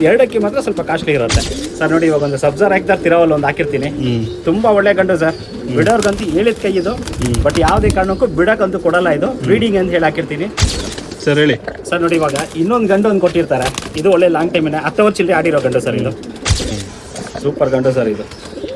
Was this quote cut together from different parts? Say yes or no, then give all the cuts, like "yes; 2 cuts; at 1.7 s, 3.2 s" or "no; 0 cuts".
yes; 3 cuts; at 1.5 s, 10.8 s, 16.7 s